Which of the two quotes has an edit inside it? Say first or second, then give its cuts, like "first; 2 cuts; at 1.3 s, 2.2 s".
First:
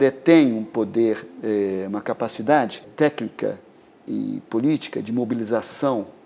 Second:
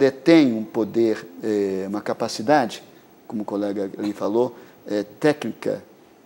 first; 1 cut; at 2.9 s